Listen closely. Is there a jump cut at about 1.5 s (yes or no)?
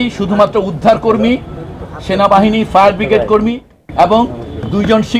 no